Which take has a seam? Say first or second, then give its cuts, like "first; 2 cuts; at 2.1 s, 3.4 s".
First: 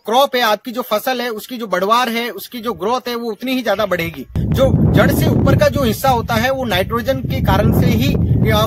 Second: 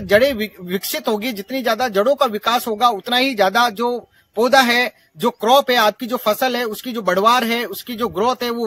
first; 1 cut; at 4.3 s